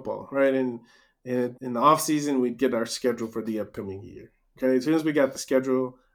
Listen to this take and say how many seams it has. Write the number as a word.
one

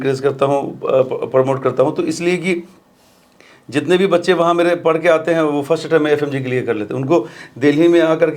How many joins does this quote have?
zero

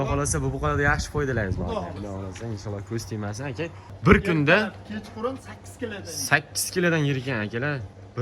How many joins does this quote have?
one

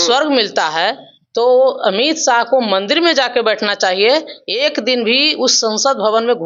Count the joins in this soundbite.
zero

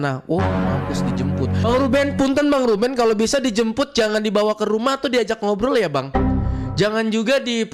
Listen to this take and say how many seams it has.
zero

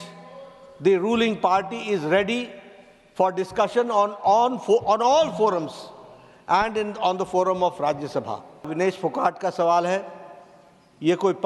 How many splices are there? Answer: one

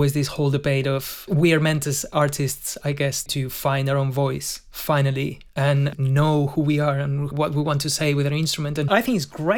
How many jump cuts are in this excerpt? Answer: five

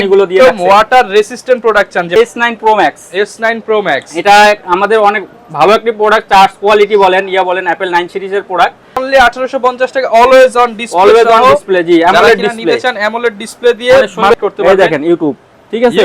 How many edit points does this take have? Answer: three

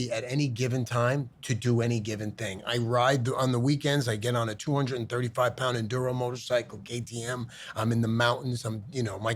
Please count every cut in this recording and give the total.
zero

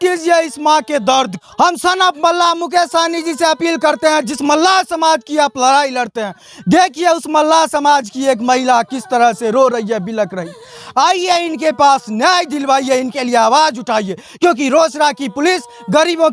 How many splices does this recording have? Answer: one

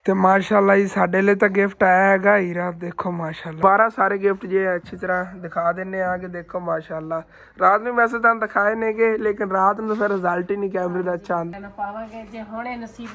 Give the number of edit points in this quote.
two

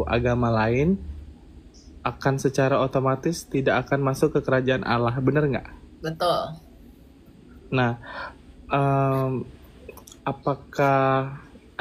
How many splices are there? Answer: zero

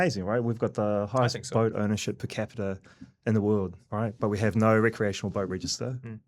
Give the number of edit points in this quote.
one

